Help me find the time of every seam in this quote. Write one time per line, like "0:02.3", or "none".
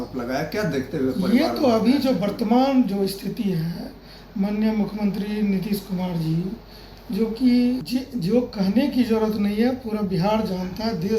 0:07.8